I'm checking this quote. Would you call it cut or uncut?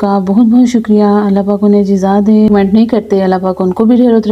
cut